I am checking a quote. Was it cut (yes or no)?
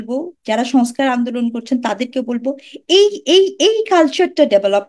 no